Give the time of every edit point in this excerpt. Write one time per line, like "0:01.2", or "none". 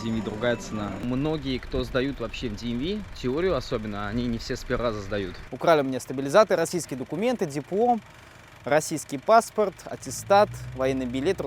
0:01.0
0:05.4